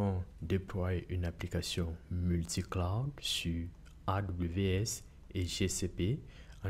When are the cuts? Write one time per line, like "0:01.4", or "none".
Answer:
none